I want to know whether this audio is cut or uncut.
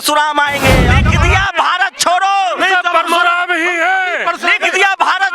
cut